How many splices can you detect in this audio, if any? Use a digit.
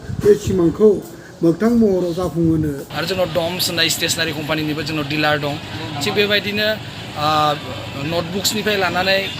1